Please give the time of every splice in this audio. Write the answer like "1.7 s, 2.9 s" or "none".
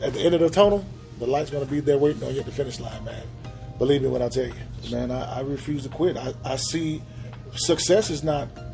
4.8 s